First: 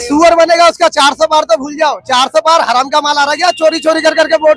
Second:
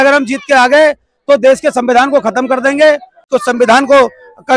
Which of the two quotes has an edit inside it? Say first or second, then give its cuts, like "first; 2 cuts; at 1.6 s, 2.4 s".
second; 1 cut; at 3.3 s